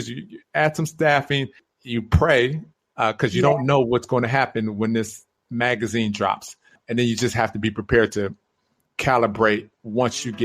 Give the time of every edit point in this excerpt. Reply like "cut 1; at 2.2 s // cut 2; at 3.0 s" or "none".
cut 1; at 1.6 s // cut 2; at 6.8 s